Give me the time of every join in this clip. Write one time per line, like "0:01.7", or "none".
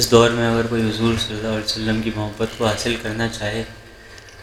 none